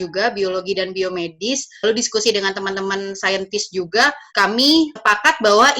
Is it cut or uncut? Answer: uncut